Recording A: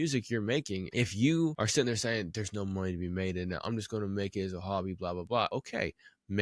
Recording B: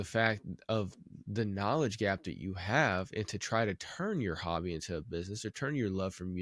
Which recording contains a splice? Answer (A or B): A